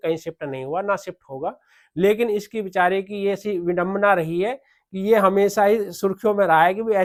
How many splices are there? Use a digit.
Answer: 0